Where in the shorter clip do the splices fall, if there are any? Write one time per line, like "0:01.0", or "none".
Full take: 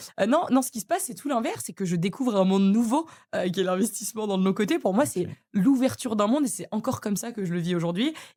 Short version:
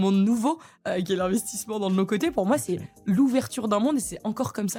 none